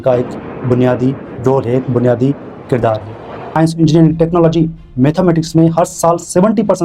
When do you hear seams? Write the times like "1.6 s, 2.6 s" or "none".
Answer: 3.5 s